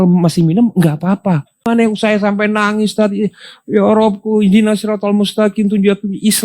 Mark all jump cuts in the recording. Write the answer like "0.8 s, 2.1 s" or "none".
1.6 s